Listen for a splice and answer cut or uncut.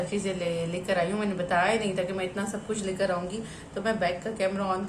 uncut